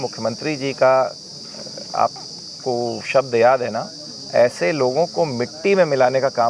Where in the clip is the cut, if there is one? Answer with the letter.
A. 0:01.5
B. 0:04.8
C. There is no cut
C